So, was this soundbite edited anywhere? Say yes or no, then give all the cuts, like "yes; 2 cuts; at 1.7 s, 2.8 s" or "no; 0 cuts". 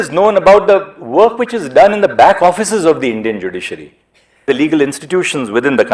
yes; 1 cut; at 4.5 s